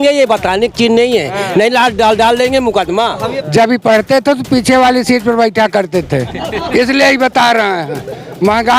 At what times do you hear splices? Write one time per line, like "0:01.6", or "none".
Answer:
0:03.3